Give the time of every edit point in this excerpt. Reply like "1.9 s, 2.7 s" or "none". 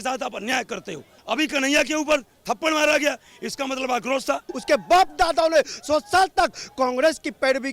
1.2 s, 4.5 s